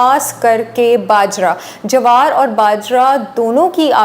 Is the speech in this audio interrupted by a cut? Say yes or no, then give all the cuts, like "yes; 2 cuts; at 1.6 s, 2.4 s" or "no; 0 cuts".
no; 0 cuts